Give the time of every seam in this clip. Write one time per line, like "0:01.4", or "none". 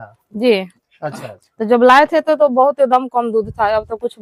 none